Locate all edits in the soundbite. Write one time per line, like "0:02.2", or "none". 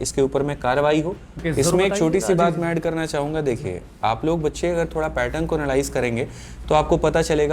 0:01.4